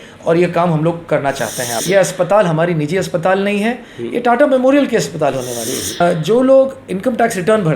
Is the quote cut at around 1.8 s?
yes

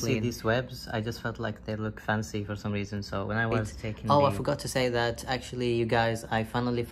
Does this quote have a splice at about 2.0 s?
no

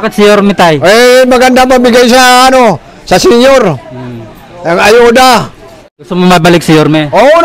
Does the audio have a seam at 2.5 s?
no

